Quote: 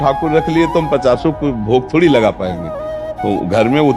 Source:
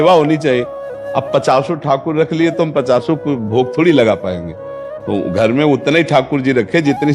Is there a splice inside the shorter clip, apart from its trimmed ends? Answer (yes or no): no